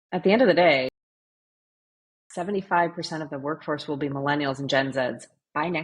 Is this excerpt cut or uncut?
uncut